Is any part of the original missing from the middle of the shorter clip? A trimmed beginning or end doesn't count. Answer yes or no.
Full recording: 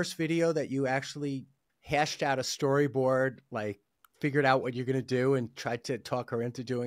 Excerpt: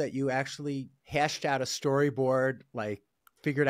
yes